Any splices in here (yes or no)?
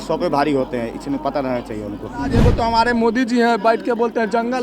yes